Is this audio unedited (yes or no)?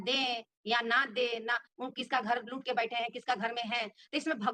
yes